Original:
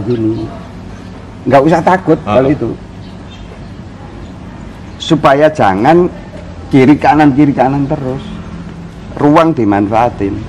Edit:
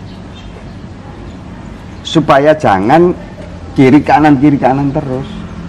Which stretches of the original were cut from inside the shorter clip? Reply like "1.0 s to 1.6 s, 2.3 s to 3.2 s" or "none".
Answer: none